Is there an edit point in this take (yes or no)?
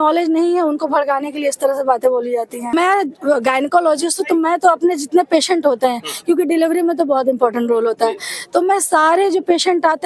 yes